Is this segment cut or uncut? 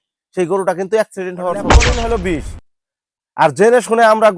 cut